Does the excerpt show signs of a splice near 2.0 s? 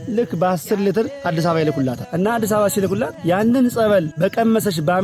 yes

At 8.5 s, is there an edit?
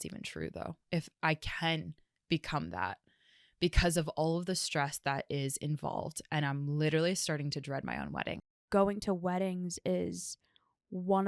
yes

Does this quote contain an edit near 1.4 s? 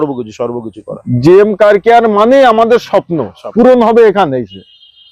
no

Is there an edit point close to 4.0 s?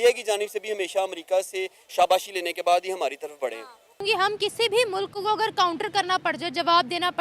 yes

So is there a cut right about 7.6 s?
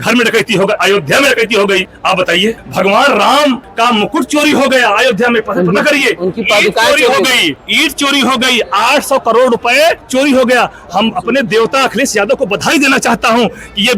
yes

